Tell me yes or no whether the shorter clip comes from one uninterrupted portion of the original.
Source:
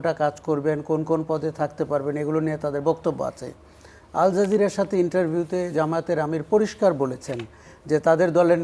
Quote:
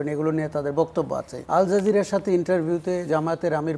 no